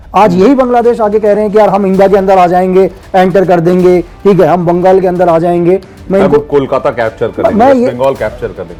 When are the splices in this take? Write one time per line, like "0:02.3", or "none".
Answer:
none